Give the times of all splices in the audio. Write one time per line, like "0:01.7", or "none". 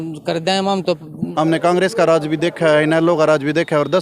0:01.2